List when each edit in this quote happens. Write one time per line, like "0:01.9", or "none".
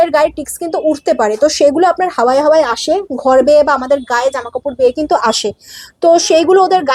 none